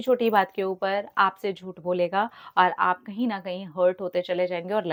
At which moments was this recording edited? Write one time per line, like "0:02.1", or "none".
none